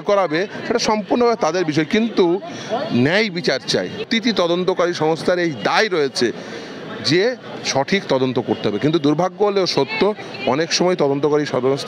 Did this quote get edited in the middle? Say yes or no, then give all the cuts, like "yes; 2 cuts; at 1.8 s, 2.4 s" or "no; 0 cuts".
yes; 1 cut; at 4.1 s